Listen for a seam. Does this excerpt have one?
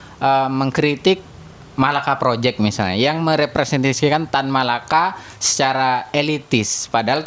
no; 0 cuts

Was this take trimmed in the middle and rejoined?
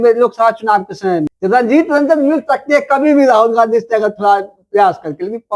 yes; 1 cut; at 1.3 s

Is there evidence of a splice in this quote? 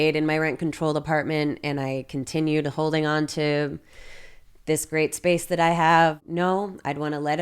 yes; 1 cut; at 6.2 s

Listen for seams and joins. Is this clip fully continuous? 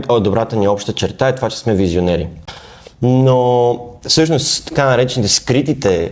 no; 1 cut; at 2.4 s

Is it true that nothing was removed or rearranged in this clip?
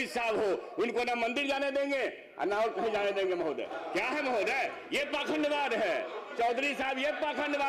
yes; 0 cuts

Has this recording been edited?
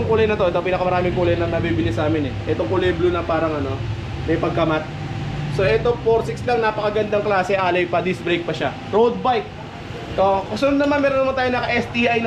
no; 0 cuts

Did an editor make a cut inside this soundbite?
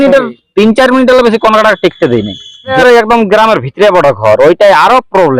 yes; 1 cut; at 2.7 s

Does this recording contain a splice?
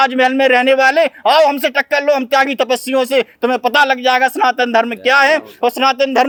no; 0 cuts

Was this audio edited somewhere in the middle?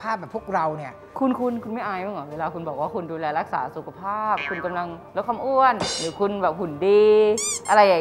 yes; 1 cut; at 1.2 s

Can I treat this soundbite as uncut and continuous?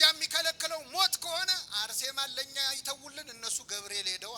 yes; 0 cuts

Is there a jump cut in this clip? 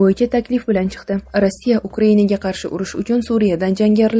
yes; 1 cut; at 1.2 s

